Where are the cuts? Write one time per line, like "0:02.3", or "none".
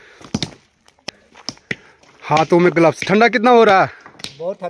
0:01.1